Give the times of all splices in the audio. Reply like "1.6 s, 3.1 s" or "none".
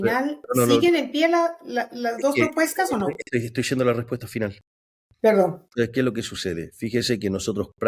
none